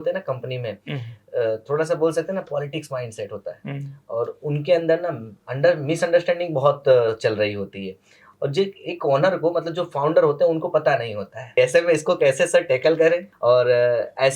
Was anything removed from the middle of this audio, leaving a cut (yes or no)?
yes